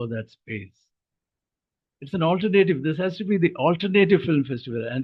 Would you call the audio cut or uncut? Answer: uncut